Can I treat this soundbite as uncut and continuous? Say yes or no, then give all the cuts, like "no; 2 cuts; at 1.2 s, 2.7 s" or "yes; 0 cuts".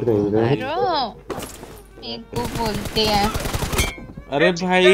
no; 1 cut; at 2.2 s